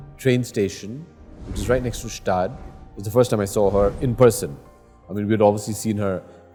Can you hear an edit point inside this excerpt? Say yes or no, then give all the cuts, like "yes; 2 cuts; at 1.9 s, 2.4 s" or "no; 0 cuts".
no; 0 cuts